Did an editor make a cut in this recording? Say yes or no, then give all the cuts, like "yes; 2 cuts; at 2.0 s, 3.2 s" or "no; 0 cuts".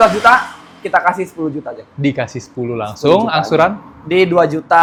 no; 0 cuts